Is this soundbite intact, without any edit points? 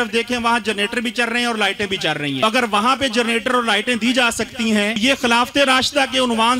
no; 2 cuts; at 2.4 s, 5.0 s

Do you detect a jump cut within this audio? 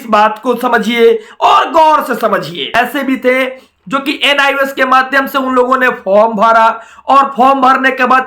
yes; 1 cut; at 2.7 s

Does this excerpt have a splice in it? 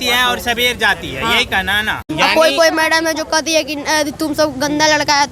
yes; 1 cut; at 2.0 s

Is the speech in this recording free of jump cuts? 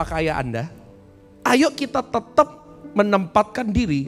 yes; 0 cuts

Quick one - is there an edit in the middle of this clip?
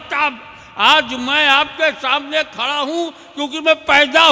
no; 0 cuts

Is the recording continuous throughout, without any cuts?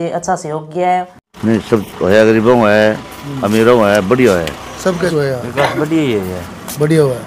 no; 2 cuts; at 1.2 s, 5.1 s

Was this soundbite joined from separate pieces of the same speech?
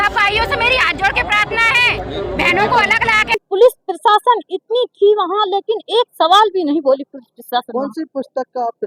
yes; 1 cut; at 3.4 s

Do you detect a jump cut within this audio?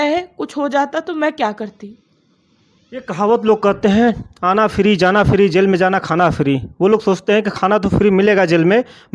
no; 0 cuts

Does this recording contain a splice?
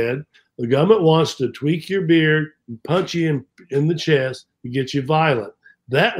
no; 0 cuts

